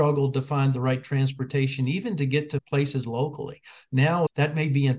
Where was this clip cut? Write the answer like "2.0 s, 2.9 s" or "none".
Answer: 2.6 s, 4.3 s